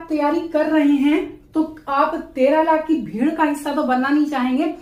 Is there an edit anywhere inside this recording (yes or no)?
no